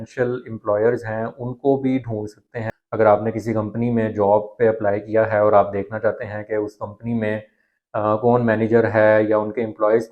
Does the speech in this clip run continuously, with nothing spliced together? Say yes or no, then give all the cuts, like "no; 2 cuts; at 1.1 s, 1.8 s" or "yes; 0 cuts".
no; 1 cut; at 2.6 s